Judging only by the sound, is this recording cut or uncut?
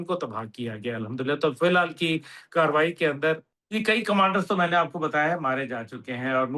cut